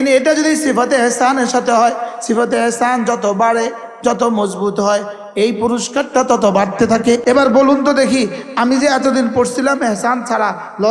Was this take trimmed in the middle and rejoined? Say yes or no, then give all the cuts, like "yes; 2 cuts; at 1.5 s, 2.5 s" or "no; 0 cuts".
yes; 1 cut; at 7.2 s